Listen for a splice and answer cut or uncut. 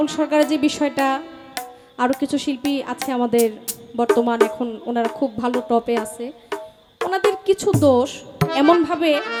uncut